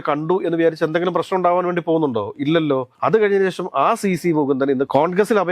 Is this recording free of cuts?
yes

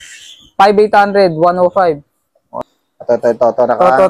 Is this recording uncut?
no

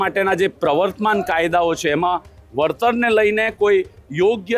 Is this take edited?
no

